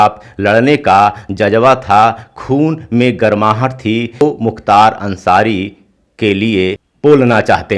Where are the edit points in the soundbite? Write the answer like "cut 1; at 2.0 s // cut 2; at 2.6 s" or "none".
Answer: cut 1; at 4.2 s // cut 2; at 6.9 s